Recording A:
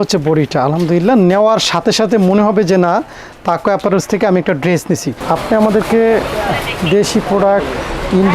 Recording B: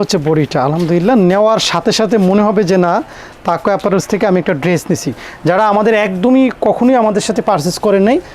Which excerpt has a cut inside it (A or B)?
A